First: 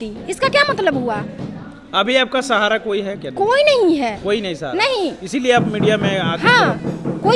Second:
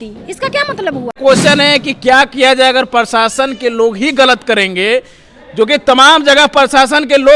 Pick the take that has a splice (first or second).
second